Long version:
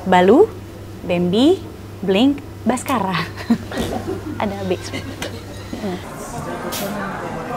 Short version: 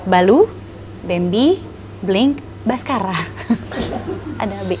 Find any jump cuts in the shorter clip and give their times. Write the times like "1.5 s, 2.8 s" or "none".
none